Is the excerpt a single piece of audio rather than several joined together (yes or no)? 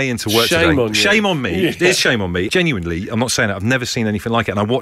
no